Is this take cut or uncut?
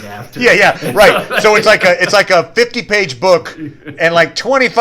uncut